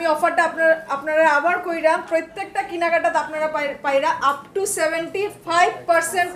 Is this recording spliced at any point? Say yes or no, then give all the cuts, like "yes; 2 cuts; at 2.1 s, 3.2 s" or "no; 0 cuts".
no; 0 cuts